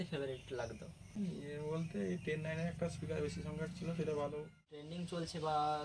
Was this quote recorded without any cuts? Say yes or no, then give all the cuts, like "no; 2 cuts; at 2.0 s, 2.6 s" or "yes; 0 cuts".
no; 2 cuts; at 1.0 s, 4.9 s